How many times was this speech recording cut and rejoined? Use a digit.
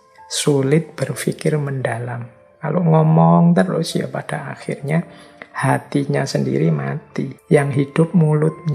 1